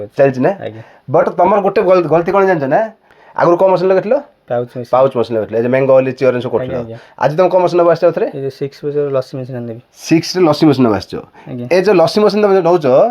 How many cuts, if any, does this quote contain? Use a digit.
1